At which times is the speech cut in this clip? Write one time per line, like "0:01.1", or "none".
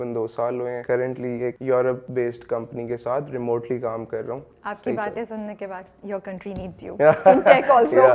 0:01.2
0:02.0
0:04.6

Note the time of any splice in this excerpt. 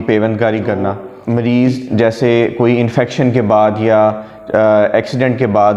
0:01.1

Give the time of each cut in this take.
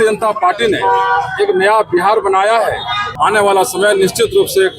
0:03.1

